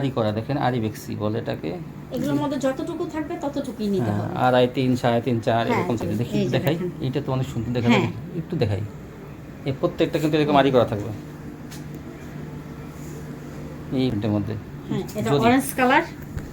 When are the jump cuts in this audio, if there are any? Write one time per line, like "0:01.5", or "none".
0:06.0
0:14.1